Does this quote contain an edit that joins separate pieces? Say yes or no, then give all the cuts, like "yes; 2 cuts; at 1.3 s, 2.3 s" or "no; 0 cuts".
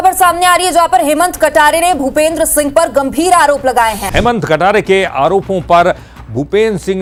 no; 0 cuts